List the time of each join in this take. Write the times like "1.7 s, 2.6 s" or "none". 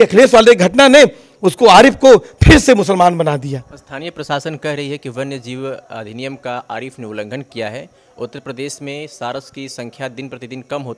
none